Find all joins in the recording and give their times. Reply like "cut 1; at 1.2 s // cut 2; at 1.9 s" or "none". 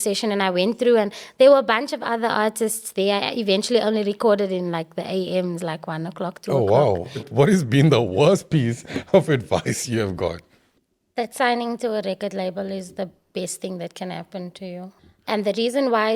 cut 1; at 7.3 s // cut 2; at 15.1 s

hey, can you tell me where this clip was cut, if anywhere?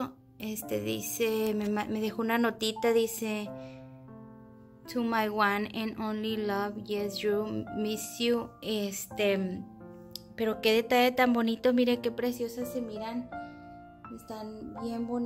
none

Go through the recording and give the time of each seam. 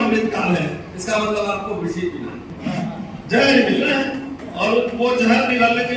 cut 1; at 2.5 s

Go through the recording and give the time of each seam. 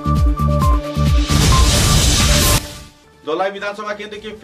cut 1; at 2.7 s

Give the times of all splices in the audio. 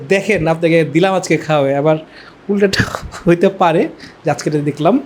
none

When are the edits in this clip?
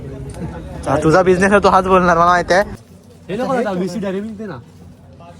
cut 1; at 2.8 s

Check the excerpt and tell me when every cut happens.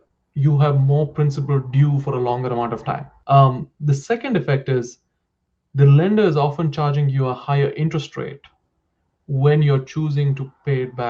cut 1; at 3.1 s

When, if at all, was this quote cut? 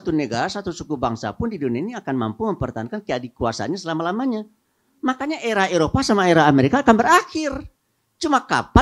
none

